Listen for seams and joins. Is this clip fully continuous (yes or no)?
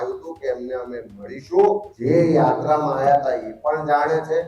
no